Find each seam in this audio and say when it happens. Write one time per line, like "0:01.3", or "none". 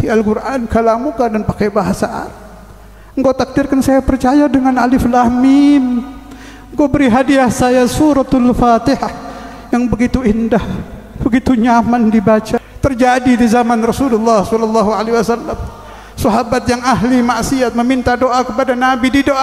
0:12.7